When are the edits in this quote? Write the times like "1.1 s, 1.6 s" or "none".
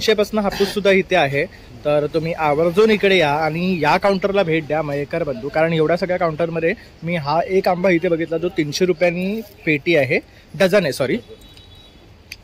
none